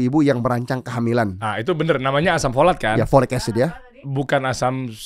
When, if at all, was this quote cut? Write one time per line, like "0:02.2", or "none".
0:04.1